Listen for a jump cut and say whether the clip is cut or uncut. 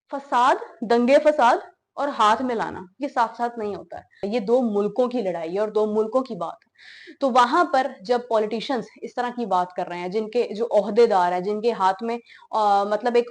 uncut